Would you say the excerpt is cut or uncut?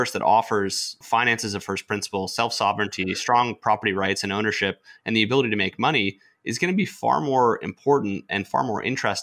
cut